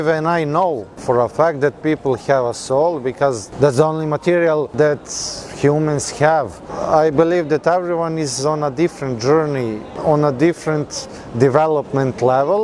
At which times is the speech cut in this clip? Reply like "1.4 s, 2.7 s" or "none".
0.9 s, 3.4 s, 4.7 s, 6.7 s, 9.9 s